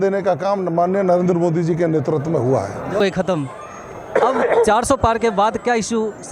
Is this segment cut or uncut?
cut